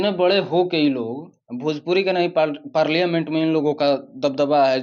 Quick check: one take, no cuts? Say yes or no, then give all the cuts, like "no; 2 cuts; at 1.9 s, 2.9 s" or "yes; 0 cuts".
yes; 0 cuts